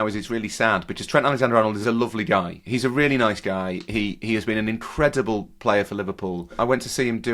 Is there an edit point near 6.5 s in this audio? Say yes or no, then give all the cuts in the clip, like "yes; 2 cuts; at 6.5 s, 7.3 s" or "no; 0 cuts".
yes; 2 cuts; at 1.8 s, 6.5 s